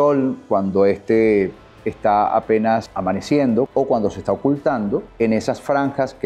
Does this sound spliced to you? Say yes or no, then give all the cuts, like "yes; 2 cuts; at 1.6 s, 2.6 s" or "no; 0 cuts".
yes; 3 cuts; at 2.9 s, 3.7 s, 5.1 s